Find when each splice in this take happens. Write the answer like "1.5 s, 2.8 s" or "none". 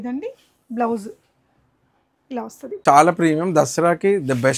2.8 s